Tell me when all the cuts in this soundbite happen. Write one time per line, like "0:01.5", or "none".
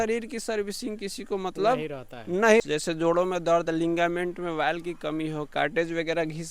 0:02.6